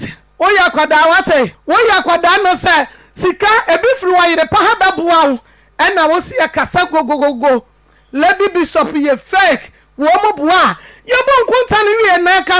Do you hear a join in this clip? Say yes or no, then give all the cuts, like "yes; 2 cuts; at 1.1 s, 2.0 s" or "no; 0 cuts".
yes; 1 cut; at 1.6 s